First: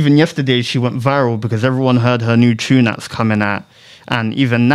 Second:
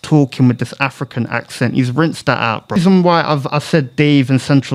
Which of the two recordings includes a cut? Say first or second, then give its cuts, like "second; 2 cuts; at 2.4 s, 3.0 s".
second; 1 cut; at 2.8 s